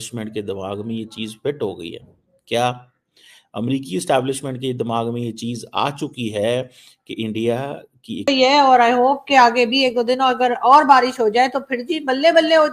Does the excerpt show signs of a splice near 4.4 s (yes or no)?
no